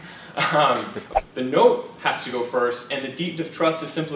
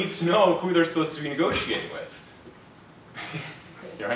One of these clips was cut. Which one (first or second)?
first